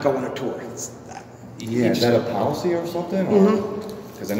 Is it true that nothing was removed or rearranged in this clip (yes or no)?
yes